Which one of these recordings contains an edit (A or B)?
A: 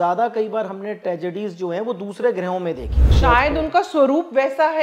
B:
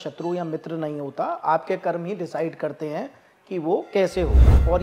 A